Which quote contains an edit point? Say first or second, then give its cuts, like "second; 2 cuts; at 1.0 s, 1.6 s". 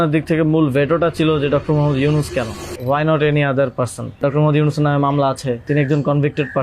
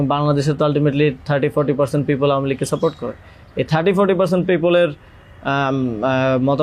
first; 3 cuts; at 2.7 s, 4.2 s, 5.6 s